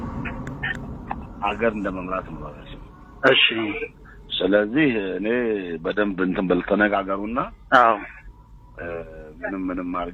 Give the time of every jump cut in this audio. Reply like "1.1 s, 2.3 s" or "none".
none